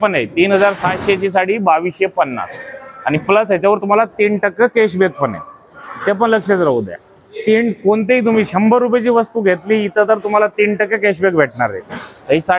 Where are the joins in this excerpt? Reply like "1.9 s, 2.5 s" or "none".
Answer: none